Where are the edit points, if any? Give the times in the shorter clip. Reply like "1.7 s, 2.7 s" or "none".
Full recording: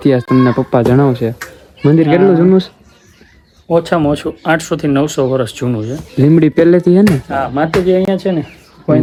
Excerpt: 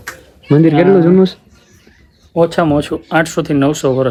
none